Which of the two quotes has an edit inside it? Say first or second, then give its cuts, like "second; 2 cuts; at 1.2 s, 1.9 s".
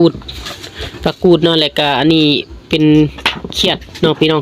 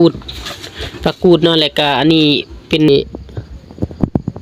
second; 1 cut; at 2.9 s